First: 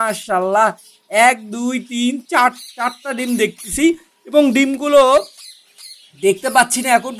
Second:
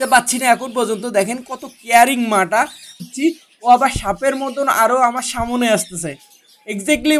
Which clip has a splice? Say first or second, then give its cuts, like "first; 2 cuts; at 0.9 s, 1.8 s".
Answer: second; 1 cut; at 3.1 s